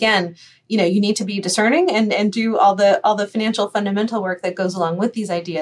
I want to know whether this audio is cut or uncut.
uncut